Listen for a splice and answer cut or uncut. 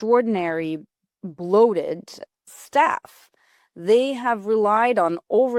uncut